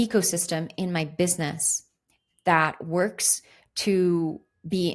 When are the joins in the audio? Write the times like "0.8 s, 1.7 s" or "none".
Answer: none